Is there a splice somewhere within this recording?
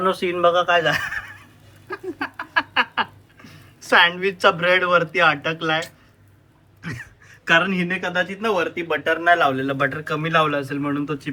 no; 0 cuts

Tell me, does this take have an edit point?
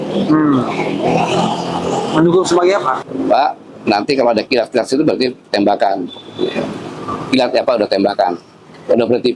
yes; 1 cut; at 3.1 s

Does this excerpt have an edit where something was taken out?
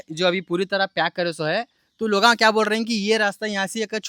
no; 0 cuts

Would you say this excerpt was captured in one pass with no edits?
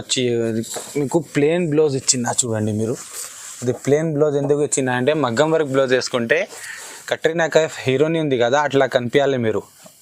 yes; 0 cuts

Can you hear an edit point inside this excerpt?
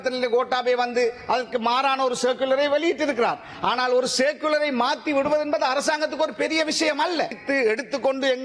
yes; 1 cut; at 7.4 s

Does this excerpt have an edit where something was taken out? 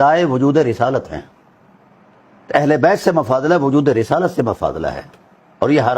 no; 0 cuts

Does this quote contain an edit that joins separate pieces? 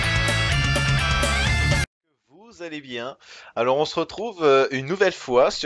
no; 0 cuts

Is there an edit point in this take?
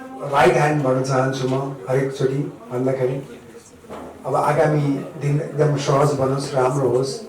no; 0 cuts

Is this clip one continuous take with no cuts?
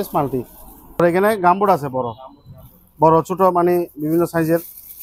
no; 1 cut; at 1.0 s

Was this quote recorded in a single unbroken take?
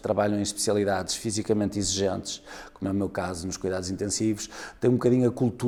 yes; 0 cuts

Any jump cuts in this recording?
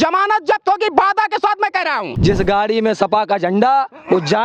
yes; 1 cut; at 2.1 s

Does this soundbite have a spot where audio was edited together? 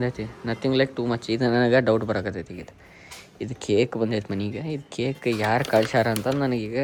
no; 0 cuts

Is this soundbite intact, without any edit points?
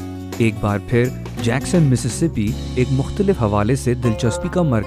no; 1 cut; at 3.0 s

